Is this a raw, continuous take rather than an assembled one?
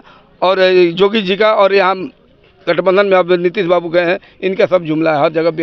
yes; 0 cuts

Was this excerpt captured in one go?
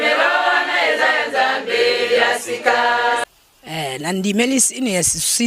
yes; 0 cuts

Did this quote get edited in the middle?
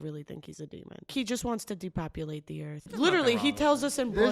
yes; 2 cuts; at 1.1 s, 2.9 s

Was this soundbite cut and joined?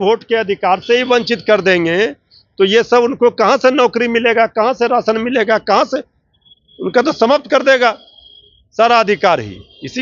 no; 0 cuts

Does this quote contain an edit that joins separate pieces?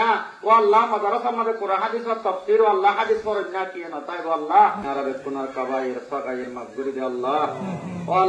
yes; 1 cut; at 4.8 s

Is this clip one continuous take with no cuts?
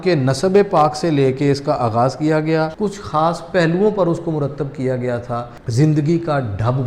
no; 2 cuts; at 2.7 s, 5.7 s

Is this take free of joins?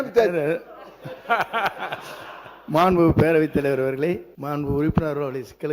no; 1 cut; at 4.3 s

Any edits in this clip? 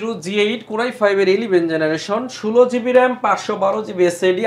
no; 0 cuts

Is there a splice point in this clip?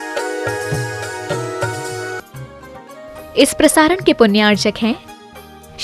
yes; 1 cut; at 2.2 s

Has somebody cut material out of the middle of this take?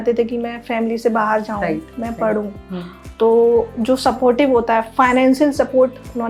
no; 0 cuts

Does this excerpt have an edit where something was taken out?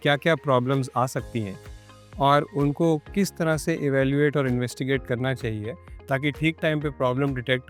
no; 0 cuts

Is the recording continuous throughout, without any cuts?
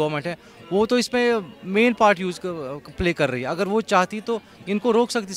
yes; 0 cuts

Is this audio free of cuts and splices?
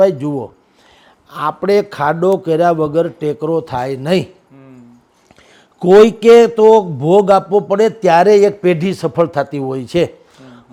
yes; 0 cuts

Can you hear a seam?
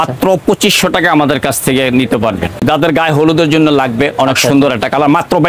yes; 1 cut; at 2.6 s

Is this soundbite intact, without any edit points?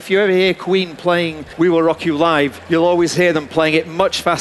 no; 2 cuts; at 1.4 s, 2.6 s

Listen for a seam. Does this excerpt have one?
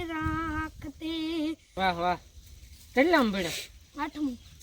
yes; 1 cut; at 1.7 s

